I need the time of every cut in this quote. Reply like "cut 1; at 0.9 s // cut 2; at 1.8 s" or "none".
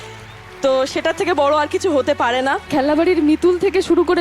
cut 1; at 2.7 s